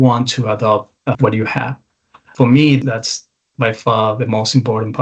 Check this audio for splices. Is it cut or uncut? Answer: cut